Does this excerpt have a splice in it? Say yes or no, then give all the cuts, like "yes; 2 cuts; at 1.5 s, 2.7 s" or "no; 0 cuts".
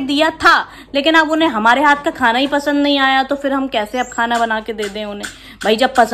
no; 0 cuts